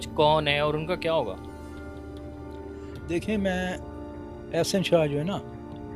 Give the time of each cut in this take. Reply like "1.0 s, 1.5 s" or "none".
none